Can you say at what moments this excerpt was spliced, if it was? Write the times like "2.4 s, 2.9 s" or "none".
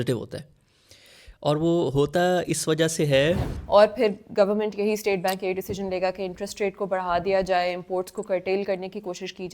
3.5 s